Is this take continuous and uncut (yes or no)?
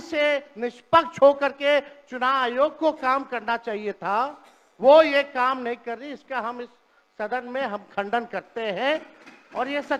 yes